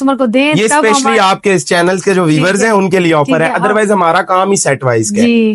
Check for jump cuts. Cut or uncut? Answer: uncut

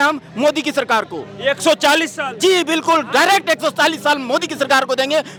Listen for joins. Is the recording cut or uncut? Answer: uncut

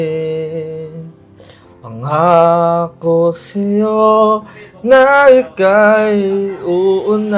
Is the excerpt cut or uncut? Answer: uncut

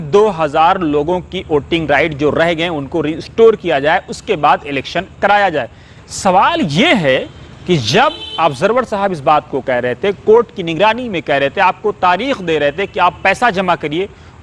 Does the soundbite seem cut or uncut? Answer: uncut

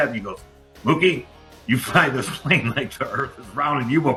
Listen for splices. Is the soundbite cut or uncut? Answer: uncut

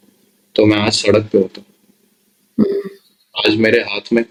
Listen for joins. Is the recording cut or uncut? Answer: uncut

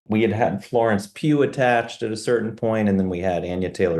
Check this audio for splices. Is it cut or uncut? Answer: uncut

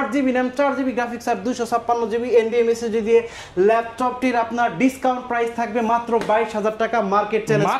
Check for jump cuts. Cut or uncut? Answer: uncut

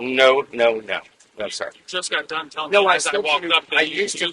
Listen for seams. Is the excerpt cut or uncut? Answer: uncut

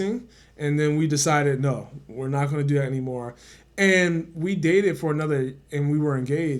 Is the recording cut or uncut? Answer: uncut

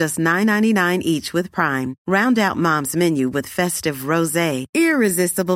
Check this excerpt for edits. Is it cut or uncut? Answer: uncut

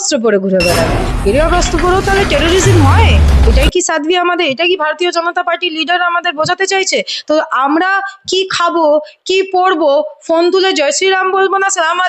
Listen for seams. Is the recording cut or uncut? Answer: uncut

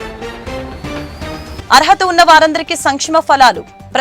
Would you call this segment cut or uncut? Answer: cut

